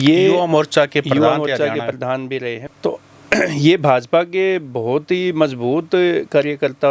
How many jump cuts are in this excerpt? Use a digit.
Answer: 1